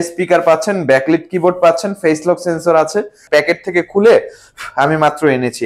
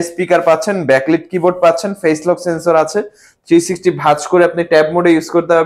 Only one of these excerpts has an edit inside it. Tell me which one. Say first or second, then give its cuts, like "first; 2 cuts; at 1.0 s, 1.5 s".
first; 1 cut; at 3.2 s